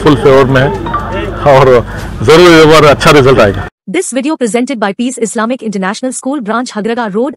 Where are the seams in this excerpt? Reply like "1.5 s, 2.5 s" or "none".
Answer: 3.7 s